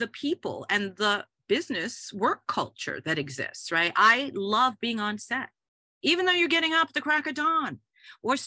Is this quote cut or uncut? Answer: cut